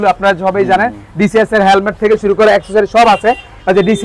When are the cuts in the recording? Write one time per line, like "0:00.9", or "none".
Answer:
none

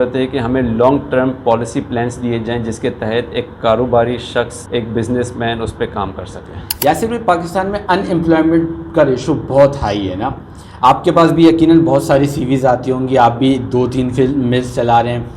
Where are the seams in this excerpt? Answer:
0:04.6
0:06.7

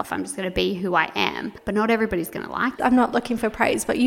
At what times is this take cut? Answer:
0:01.5
0:02.7

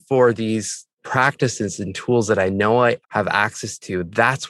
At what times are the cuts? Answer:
0:00.9

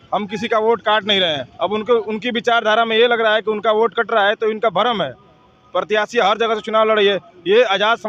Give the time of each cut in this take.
none

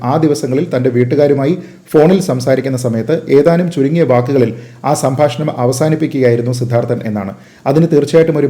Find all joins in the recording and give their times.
none

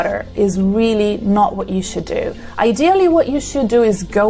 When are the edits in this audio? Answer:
none

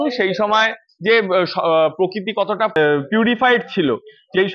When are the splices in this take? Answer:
0:02.8

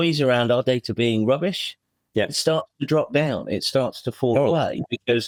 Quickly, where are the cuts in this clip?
none

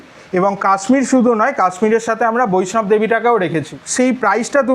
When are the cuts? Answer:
0:03.7

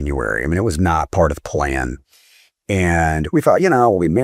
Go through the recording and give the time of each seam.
none

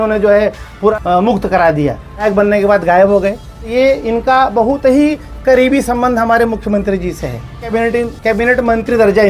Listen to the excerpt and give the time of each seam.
0:00.9
0:02.2
0:03.7
0:07.7

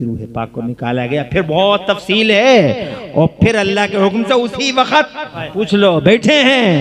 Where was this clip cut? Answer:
0:05.4

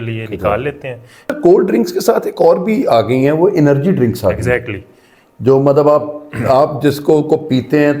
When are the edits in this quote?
0:01.3

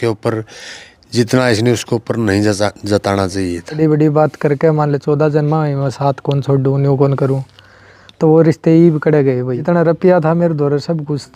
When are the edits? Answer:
0:03.8
0:09.6

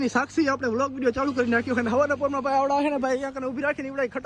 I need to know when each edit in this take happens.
0:01.8

